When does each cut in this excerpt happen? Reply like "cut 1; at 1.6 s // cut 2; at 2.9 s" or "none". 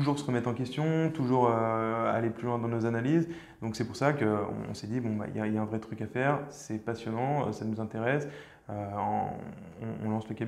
none